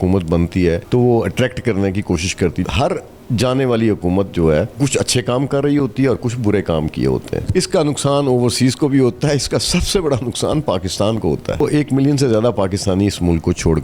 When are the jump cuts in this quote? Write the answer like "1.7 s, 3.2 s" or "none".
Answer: 0.8 s, 2.6 s, 4.8 s, 7.5 s, 11.6 s